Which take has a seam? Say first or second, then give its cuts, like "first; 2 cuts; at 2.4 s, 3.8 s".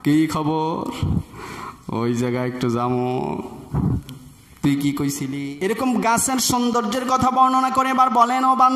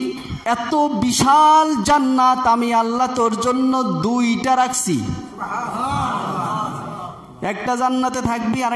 first; 1 cut; at 5.3 s